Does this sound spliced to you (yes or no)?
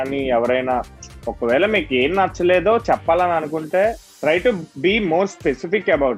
no